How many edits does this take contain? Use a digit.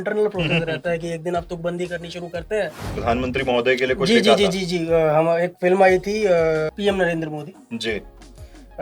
2